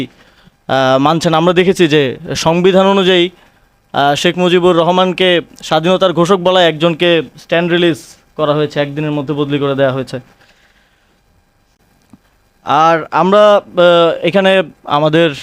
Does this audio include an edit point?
no; 0 cuts

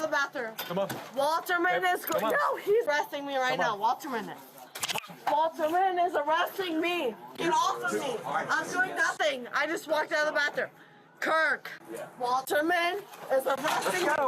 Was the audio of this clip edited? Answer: no; 0 cuts

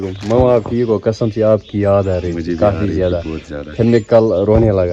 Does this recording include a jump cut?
no; 0 cuts

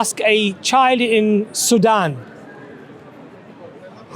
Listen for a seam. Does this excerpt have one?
no; 0 cuts

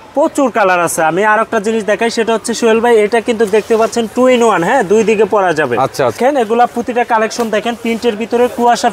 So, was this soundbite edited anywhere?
yes; 1 cut; at 6.2 s

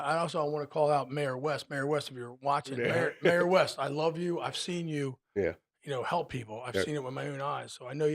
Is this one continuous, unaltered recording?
no; 1 cut; at 2.8 s

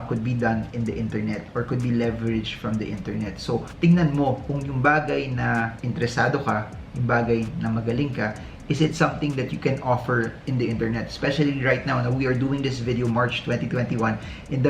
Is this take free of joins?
yes; 0 cuts

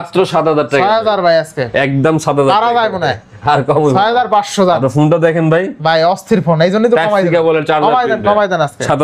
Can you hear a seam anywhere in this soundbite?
no; 0 cuts

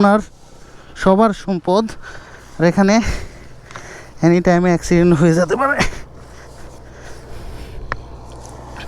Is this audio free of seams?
yes; 0 cuts

